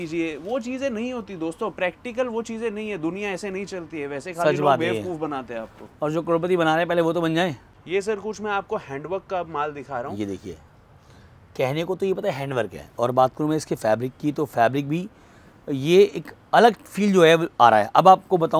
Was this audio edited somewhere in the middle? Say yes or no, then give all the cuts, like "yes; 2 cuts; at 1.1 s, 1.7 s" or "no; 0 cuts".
no; 0 cuts